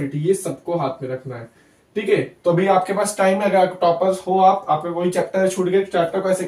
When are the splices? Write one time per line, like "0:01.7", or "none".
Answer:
none